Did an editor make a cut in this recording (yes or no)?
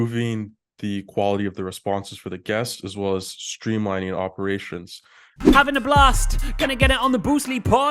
yes